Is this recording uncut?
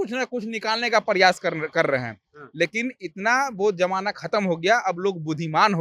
yes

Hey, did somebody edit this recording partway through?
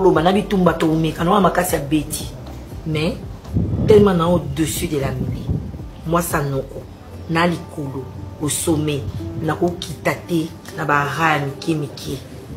no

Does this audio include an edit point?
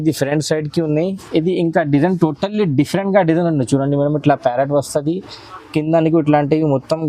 no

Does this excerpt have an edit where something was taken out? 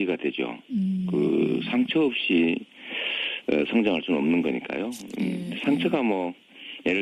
no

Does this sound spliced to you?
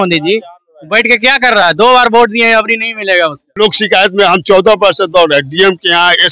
yes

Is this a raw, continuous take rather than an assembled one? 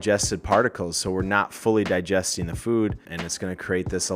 no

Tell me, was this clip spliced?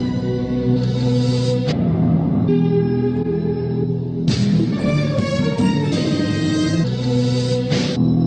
no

